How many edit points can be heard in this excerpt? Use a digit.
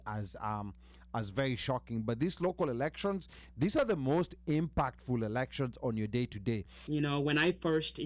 1